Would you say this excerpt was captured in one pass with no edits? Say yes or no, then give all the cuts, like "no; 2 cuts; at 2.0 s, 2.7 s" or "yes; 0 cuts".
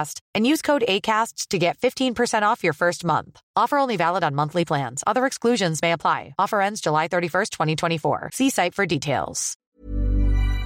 no; 1 cut; at 9.5 s